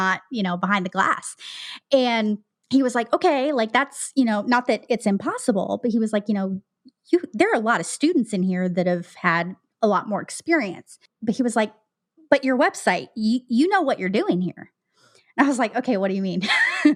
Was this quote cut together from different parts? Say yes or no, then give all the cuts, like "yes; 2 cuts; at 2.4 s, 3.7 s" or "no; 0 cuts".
no; 0 cuts